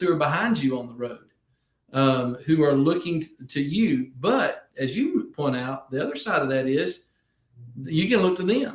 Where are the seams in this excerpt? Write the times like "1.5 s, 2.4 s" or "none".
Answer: none